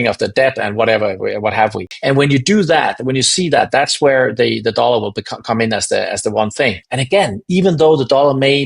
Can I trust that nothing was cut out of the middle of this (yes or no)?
no